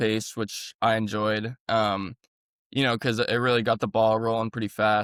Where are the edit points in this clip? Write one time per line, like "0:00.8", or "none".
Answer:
none